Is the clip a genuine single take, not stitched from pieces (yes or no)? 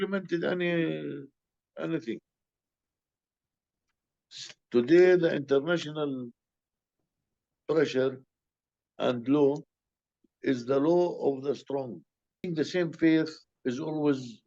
no